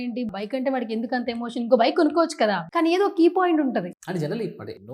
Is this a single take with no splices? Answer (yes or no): no